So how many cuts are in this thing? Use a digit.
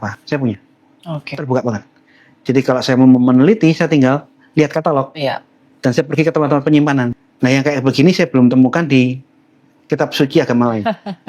1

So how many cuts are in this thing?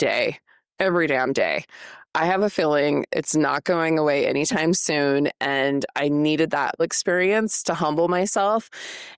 1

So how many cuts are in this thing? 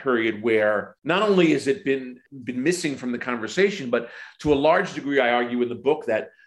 2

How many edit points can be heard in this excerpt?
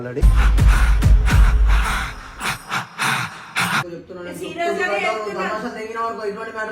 1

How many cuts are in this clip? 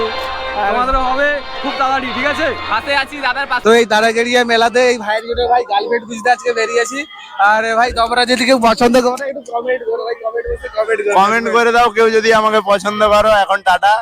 1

